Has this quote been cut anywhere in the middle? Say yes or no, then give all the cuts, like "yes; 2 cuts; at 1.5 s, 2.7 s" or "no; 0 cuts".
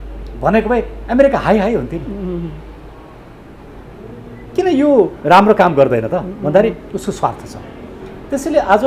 no; 0 cuts